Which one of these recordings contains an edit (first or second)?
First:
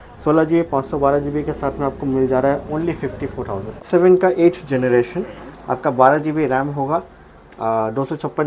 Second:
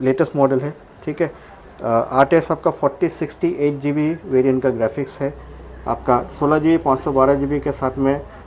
first